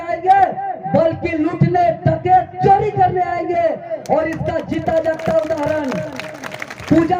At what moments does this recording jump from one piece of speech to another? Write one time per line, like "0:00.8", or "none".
none